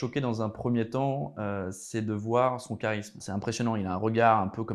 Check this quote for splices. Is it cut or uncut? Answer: cut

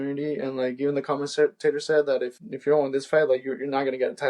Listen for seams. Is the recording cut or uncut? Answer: cut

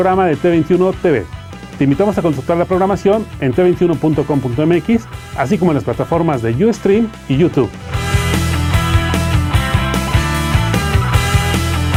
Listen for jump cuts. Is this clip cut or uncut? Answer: uncut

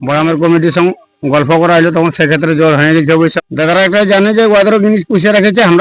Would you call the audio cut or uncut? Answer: cut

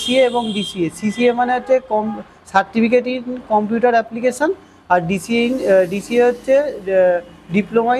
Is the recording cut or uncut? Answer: uncut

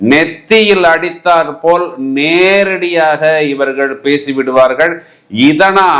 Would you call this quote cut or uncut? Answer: uncut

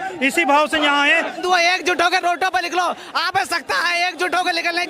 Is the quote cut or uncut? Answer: cut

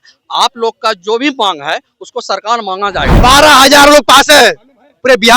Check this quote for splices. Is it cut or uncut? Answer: cut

